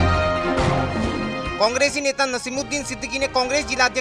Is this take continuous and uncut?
no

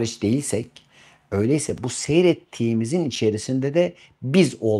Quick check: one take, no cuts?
yes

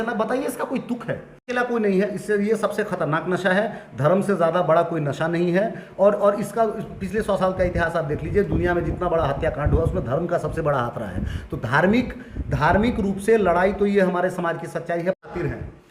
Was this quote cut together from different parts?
yes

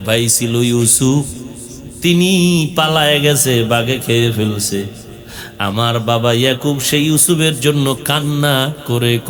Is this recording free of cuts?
yes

